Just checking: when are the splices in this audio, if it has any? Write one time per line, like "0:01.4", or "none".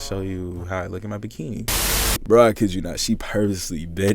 0:01.7